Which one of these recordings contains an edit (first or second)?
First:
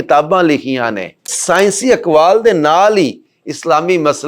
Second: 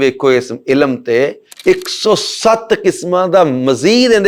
first